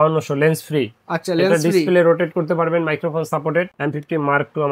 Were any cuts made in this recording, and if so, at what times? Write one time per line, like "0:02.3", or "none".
0:03.7